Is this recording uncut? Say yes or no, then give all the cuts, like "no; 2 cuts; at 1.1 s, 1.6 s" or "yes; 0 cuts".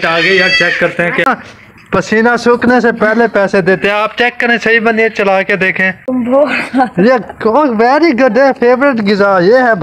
no; 2 cuts; at 1.2 s, 6.1 s